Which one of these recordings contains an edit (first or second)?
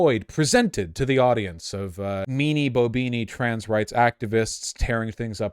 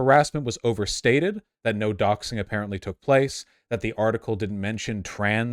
first